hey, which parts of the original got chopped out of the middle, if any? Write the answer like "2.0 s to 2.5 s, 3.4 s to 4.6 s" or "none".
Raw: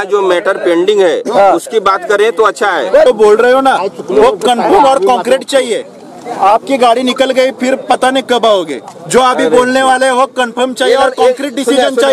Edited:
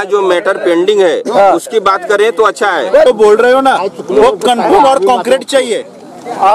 none